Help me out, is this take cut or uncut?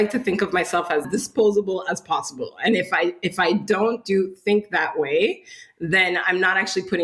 cut